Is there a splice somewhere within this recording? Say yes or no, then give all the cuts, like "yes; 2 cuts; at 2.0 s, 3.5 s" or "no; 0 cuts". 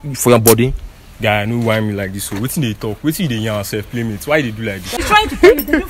yes; 1 cut; at 4.9 s